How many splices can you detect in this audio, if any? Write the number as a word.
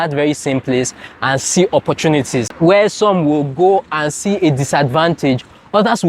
one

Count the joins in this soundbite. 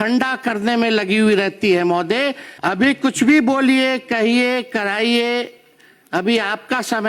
one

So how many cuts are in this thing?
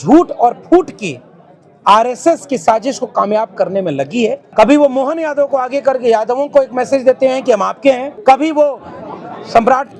two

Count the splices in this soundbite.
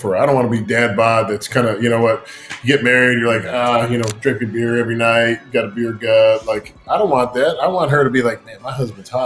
zero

